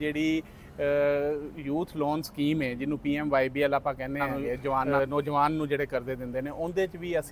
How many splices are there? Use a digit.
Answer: 1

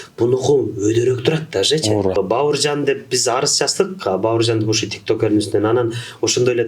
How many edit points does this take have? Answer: 1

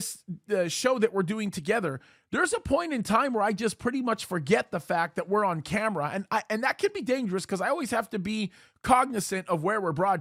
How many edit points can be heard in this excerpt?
0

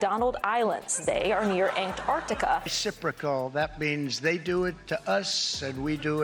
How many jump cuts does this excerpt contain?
1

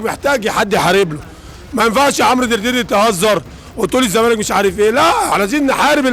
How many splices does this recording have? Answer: 0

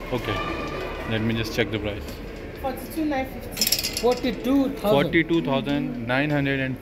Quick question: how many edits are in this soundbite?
0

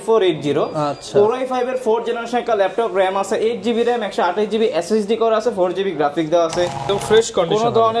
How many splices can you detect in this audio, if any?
1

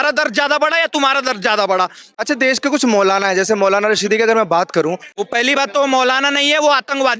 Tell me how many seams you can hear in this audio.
2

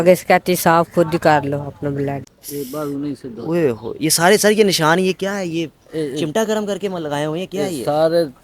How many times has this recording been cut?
1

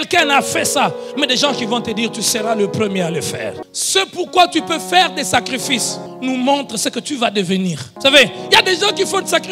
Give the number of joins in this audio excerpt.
3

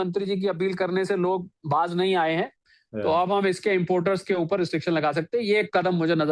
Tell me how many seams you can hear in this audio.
0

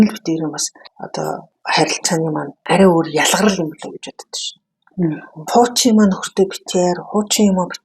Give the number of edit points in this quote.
2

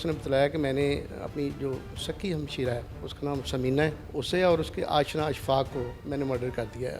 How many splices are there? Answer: 3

